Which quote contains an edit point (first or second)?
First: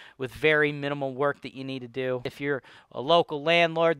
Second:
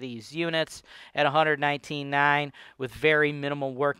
first